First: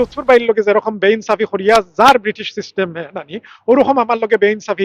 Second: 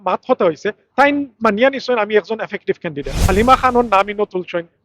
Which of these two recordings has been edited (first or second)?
second